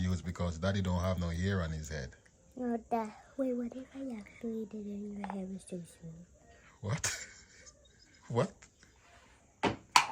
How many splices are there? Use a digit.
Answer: 0